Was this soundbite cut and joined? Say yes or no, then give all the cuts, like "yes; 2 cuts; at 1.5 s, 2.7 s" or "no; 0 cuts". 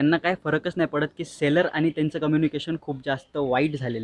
no; 0 cuts